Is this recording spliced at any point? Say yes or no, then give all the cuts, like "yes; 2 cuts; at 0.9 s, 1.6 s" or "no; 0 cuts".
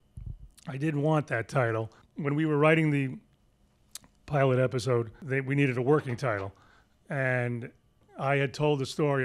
yes; 2 cuts; at 2.0 s, 5.2 s